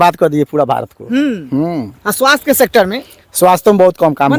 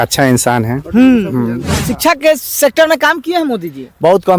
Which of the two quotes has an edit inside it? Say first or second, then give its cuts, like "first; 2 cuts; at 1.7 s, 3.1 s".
second; 1 cut; at 1.9 s